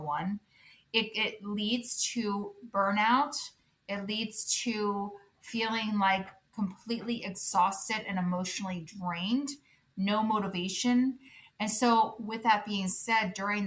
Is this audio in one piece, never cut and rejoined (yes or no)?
yes